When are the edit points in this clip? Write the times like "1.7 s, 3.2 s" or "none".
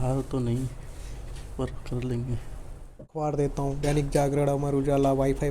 3.0 s